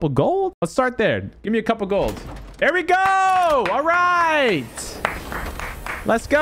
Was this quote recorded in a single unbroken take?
yes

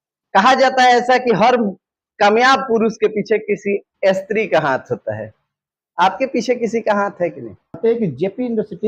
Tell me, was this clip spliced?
yes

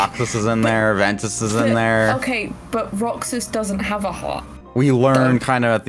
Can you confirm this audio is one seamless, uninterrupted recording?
no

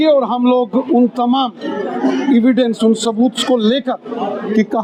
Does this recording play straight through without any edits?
yes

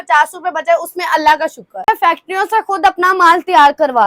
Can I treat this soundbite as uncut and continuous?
no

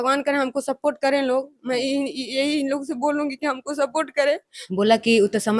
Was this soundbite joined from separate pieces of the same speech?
yes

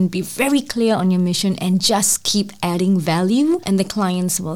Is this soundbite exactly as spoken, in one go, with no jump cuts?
no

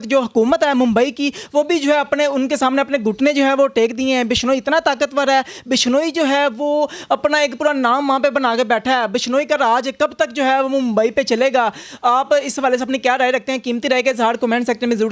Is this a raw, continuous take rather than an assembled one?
yes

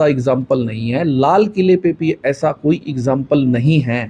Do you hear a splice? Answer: no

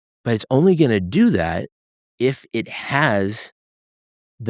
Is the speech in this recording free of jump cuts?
yes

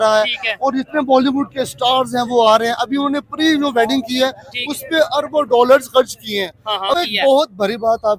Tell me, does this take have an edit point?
yes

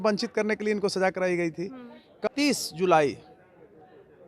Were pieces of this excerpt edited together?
yes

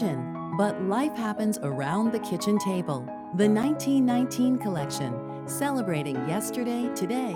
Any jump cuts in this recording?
no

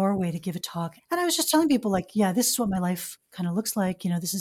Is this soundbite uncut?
no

